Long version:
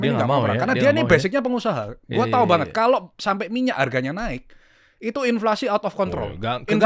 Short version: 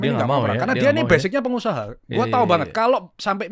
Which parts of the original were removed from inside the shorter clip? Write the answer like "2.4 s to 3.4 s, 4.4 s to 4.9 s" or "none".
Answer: none